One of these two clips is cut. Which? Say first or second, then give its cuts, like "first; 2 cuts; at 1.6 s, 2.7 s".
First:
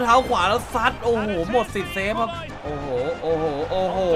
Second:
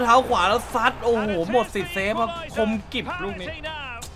first; 1 cut; at 2.4 s